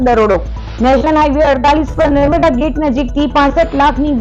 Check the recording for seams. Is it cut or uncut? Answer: uncut